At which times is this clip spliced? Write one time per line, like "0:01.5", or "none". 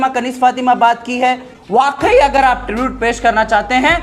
0:01.5